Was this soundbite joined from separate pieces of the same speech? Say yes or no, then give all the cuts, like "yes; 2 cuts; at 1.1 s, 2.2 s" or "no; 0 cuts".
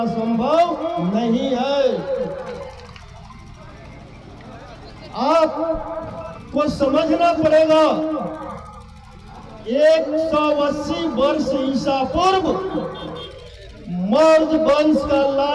no; 0 cuts